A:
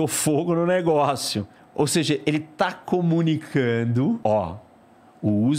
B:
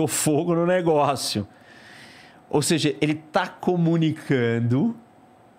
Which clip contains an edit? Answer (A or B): A